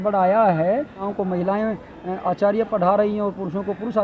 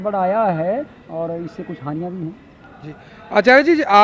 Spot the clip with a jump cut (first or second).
first